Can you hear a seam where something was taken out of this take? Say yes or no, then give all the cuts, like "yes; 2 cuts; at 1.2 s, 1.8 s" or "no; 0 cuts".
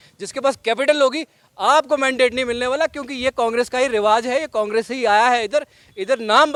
no; 0 cuts